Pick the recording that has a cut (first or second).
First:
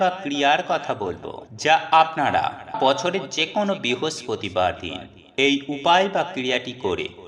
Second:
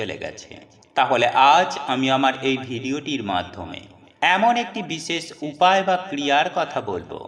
first